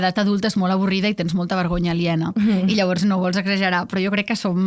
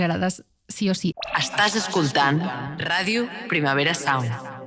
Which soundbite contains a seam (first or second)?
second